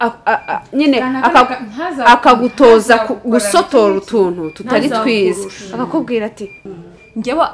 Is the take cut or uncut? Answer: cut